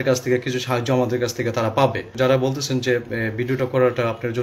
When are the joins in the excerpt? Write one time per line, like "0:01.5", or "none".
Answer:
0:02.1